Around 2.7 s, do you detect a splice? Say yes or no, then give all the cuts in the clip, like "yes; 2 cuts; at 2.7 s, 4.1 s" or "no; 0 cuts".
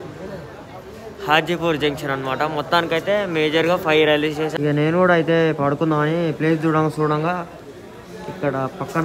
no; 1 cut; at 4.5 s